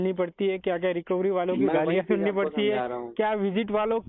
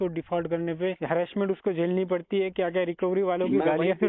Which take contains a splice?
second; 1 cut; at 1.0 s

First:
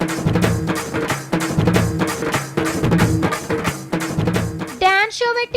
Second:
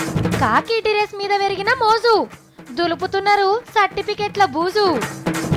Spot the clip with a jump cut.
first; 1 cut; at 2.2 s

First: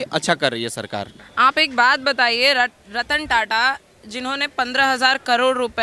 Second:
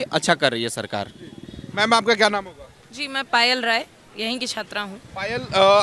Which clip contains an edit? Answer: first; 1 cut; at 1.2 s

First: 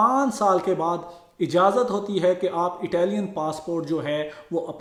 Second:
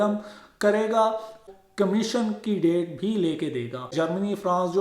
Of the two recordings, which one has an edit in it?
second; 2 cuts; at 1.4 s, 3.9 s

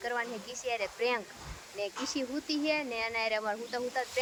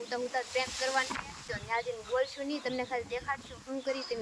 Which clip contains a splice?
second; 1 cut; at 1.5 s

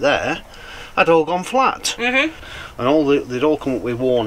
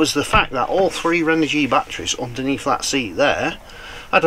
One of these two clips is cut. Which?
first; 1 cut; at 2.5 s

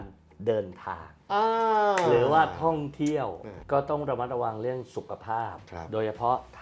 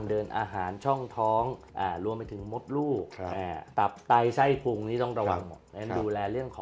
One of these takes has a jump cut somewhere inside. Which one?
first; 1 cut; at 3.5 s

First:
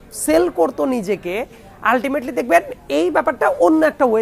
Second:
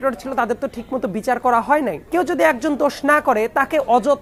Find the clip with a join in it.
second; 1 cut; at 2.0 s

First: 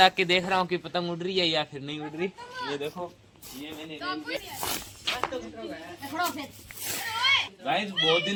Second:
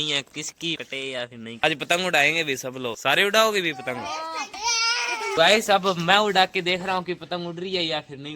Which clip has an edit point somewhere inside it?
second; 2 cuts; at 1.6 s, 5.4 s

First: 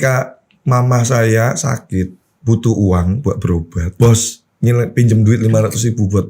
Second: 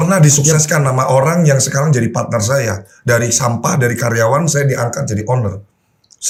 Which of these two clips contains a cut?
first; 2 cuts; at 2.3 s, 3.9 s

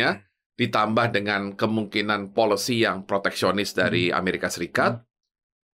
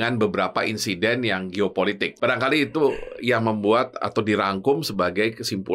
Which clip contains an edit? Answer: second; 1 cut; at 2.1 s

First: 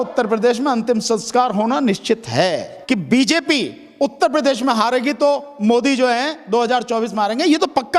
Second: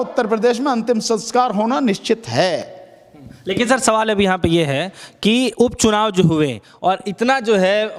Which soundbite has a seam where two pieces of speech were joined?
first; 1 cut; at 2.7 s

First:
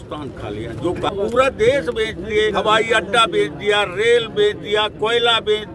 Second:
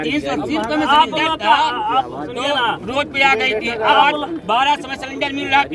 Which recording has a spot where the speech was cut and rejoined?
first; 2 cuts; at 1.1 s, 2.5 s

